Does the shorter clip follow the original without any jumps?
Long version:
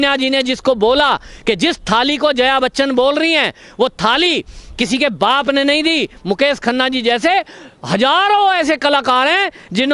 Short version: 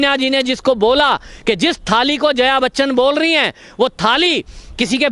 yes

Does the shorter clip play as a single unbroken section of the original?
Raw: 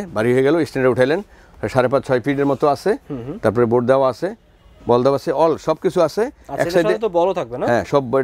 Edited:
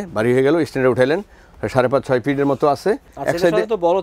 no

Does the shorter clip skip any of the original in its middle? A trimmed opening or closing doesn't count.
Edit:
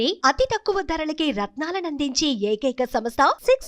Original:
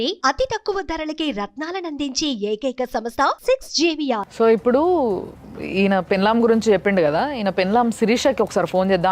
no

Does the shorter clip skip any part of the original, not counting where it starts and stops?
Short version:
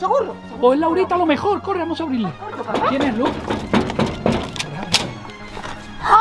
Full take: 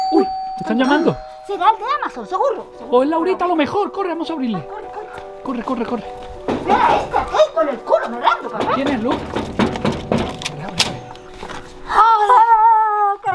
yes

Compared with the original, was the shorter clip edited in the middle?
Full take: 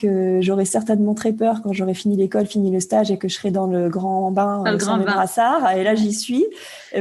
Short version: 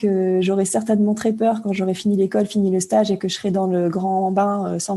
no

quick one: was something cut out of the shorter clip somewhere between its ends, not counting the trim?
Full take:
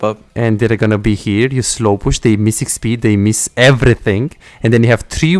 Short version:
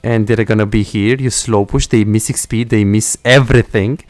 no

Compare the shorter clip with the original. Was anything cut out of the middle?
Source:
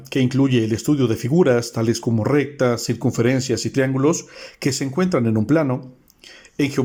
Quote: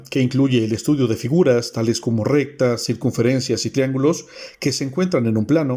no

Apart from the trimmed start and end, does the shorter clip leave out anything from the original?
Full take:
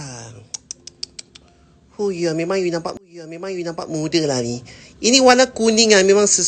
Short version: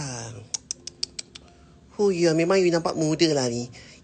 yes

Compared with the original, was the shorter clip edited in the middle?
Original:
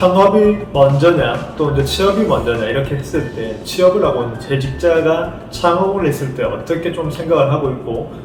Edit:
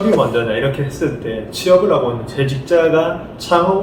no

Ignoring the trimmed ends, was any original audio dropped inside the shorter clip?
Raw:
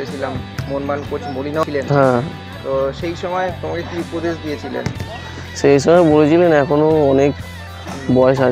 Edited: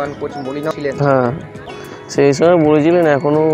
yes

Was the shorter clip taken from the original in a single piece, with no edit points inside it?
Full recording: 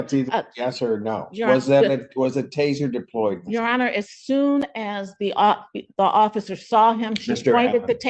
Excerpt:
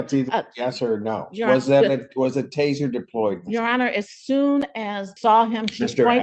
no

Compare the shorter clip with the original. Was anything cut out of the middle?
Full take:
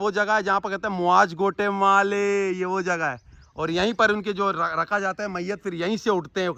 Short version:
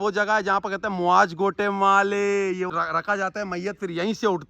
yes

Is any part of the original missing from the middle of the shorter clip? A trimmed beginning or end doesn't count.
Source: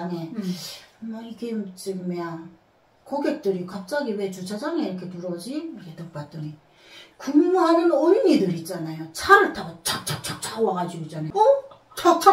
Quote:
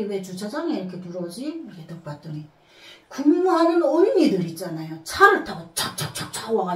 no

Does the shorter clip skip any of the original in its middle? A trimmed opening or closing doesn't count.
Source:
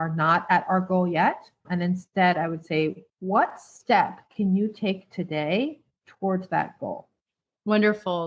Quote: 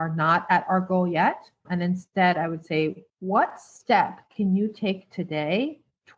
no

